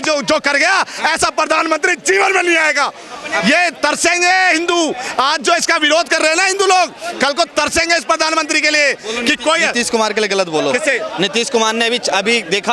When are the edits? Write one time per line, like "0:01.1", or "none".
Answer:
none